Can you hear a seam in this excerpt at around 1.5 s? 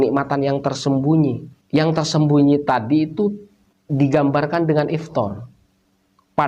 yes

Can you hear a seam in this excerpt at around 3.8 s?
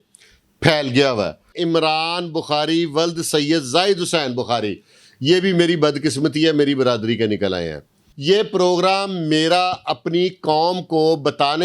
no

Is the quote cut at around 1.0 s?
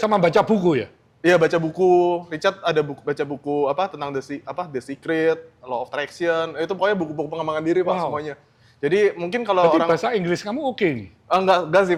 no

